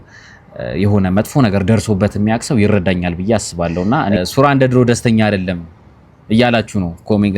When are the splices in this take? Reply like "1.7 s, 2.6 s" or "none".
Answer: 4.1 s